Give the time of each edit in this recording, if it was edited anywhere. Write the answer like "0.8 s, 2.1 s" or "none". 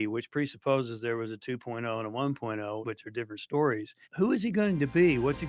2.8 s, 4.0 s